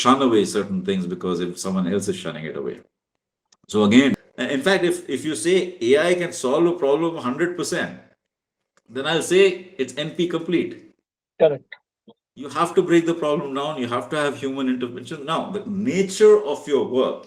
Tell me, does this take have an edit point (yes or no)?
yes